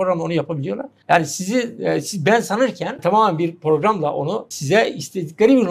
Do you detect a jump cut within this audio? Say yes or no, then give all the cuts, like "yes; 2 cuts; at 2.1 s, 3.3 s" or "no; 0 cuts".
yes; 3 cuts; at 0.9 s, 3.0 s, 4.5 s